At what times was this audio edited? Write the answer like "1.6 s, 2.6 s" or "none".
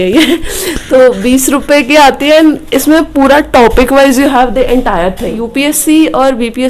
5.4 s

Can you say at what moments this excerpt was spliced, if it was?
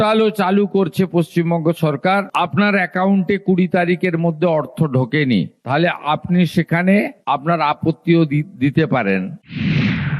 9.3 s

